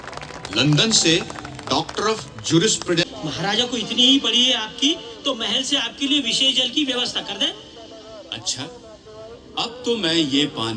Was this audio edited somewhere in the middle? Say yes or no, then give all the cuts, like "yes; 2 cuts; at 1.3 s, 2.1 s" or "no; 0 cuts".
yes; 1 cut; at 3.0 s